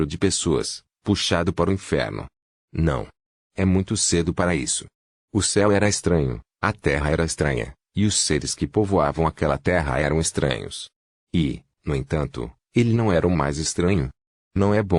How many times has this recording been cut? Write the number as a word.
one